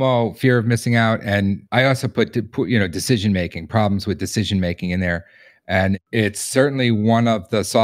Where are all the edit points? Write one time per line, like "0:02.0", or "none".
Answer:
0:01.6
0:06.0

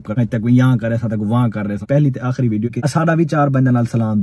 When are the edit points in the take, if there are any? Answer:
none

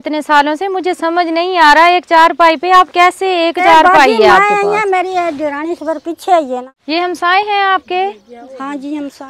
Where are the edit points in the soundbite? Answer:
0:06.7

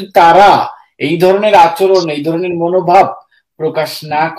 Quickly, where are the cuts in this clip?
none

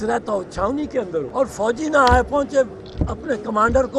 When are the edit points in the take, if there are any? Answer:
0:01.3

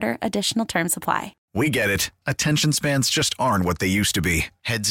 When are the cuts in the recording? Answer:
0:01.4

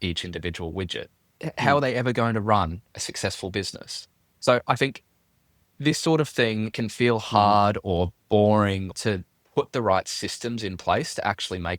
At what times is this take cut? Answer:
0:01.4
0:06.7
0:08.9

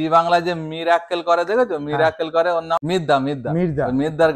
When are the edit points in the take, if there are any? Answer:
0:02.8

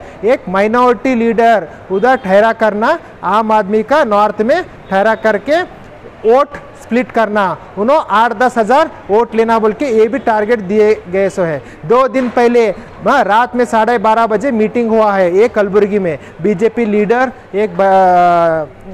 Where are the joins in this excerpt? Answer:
none

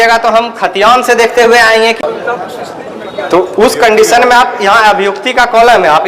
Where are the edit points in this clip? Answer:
0:02.0

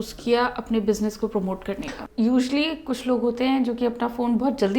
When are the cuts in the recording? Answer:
0:01.9

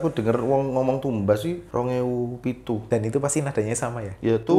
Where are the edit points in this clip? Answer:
0:01.6
0:02.8

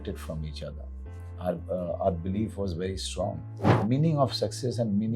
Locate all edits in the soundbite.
0:03.7

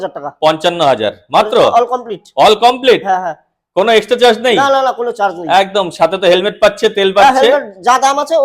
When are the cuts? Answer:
none

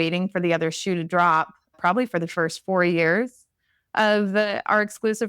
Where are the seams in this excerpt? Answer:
0:01.7

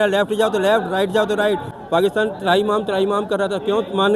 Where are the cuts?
0:01.8

